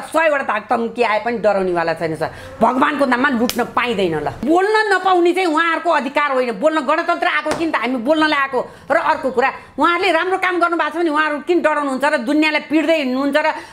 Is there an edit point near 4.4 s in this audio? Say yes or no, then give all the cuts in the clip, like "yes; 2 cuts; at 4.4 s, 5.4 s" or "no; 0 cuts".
yes; 1 cut; at 4.4 s